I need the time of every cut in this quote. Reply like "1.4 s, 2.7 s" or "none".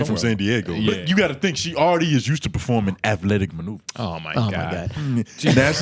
1.0 s